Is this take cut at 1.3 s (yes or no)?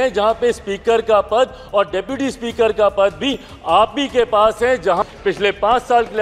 no